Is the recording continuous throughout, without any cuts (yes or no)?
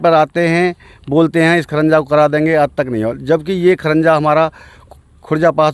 yes